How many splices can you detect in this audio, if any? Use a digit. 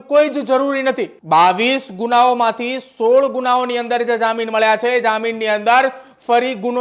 1